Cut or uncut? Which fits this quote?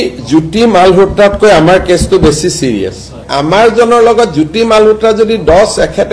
cut